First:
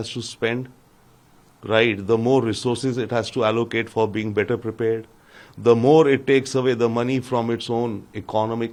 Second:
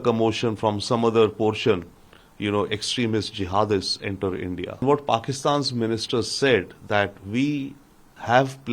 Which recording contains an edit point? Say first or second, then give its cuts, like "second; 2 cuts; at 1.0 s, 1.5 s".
second; 1 cut; at 4.8 s